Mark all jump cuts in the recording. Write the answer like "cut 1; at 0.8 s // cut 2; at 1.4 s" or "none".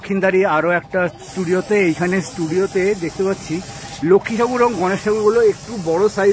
none